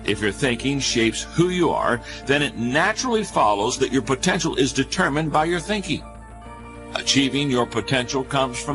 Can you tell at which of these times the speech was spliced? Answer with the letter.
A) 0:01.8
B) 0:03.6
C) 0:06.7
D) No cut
B